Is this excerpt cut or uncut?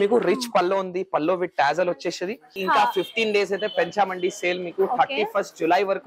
cut